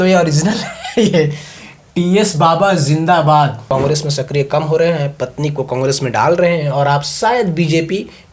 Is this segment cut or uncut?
cut